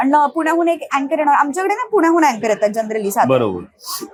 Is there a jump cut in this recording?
no; 0 cuts

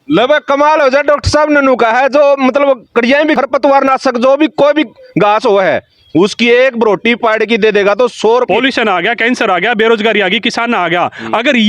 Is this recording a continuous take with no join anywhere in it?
no; 1 cut; at 8.5 s

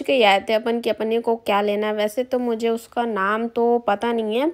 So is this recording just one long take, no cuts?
yes; 0 cuts

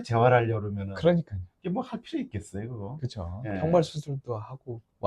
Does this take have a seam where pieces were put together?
no; 0 cuts

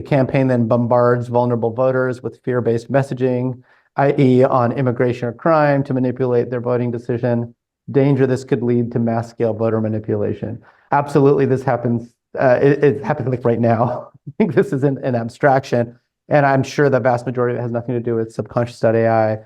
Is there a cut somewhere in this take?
no; 0 cuts

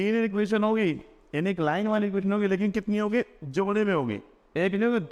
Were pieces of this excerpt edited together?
no; 0 cuts

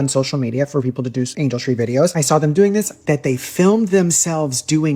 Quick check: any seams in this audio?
yes; 3 cuts; at 1.3 s, 2.1 s, 3.0 s

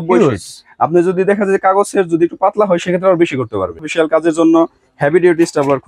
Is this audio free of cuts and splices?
no; 1 cut; at 3.8 s

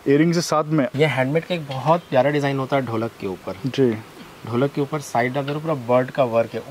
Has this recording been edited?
yes; 1 cut; at 0.9 s

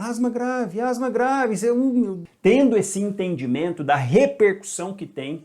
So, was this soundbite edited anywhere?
yes; 1 cut; at 2.2 s

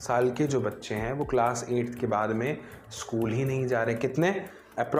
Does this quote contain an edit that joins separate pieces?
no; 0 cuts

